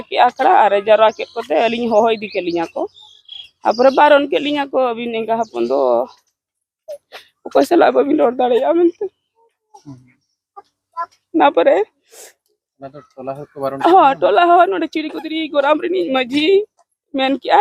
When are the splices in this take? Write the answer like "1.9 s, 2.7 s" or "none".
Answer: none